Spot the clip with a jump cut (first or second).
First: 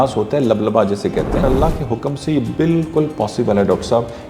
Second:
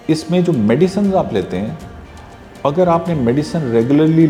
first